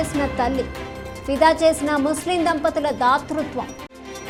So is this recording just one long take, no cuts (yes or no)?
yes